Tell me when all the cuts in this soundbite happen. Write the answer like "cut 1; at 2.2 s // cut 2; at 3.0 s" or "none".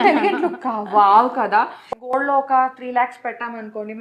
cut 1; at 2.1 s